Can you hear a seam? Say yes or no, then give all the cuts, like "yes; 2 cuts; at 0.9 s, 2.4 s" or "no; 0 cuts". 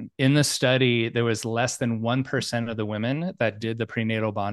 no; 0 cuts